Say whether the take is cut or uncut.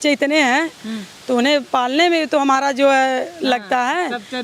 uncut